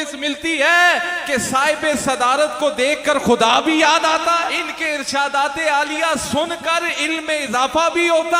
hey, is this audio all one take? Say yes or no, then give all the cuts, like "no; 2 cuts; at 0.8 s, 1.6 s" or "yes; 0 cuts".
no; 1 cut; at 4.7 s